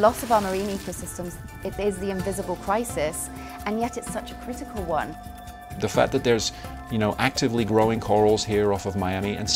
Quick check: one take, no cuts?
no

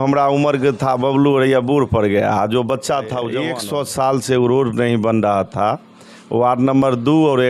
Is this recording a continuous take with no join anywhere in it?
no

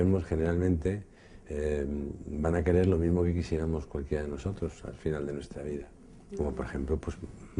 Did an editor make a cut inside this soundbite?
yes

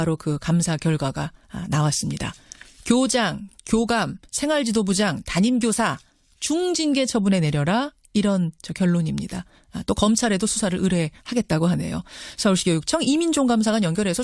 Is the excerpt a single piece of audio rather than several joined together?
no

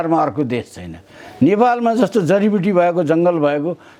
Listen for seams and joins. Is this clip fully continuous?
yes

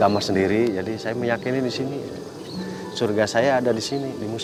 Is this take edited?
no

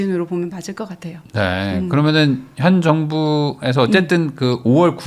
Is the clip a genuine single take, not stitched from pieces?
yes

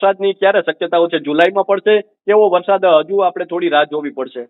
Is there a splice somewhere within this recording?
no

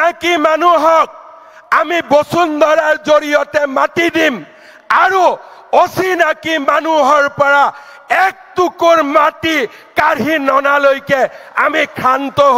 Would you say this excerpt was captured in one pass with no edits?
yes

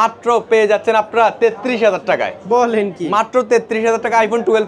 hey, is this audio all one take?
yes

